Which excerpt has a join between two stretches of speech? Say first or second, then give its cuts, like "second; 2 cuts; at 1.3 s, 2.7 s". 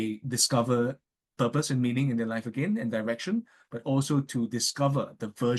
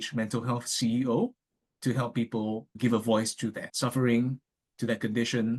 second; 2 cuts; at 2.8 s, 3.7 s